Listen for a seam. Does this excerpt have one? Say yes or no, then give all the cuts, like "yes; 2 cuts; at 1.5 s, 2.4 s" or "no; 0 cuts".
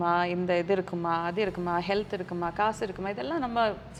no; 0 cuts